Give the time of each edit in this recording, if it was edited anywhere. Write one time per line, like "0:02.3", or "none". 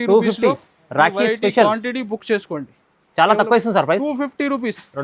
none

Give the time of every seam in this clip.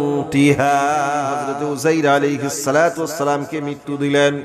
0:01.4

